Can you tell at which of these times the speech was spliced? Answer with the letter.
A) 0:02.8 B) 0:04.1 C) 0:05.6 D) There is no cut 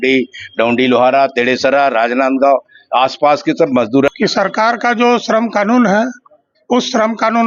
B